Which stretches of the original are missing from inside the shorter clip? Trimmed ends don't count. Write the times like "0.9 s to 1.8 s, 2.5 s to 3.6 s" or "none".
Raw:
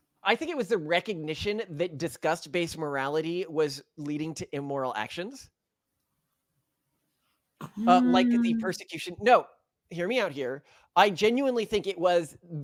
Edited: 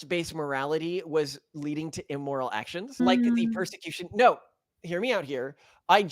5.4 s to 8.1 s